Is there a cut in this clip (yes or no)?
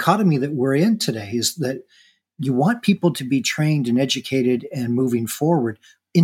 no